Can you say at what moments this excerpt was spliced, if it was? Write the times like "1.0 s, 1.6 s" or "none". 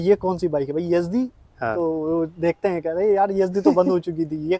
none